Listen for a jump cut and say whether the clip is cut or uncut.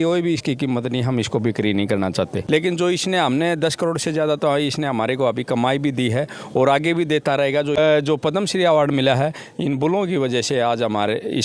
cut